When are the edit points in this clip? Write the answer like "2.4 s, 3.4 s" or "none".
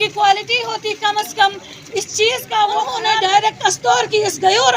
3.0 s